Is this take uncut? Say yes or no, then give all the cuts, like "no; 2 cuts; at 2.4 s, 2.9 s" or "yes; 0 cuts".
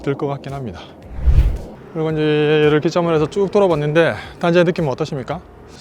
yes; 0 cuts